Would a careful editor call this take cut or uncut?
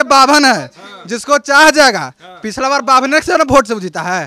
uncut